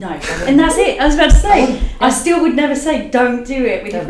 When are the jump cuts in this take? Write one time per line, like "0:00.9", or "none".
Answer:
none